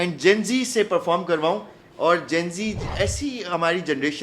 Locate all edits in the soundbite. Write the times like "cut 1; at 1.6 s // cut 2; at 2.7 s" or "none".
cut 1; at 2.9 s